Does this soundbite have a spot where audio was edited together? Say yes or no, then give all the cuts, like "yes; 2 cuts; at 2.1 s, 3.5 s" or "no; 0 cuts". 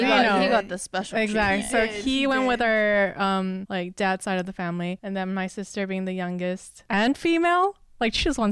yes; 3 cuts; at 3.6 s, 5.0 s, 6.7 s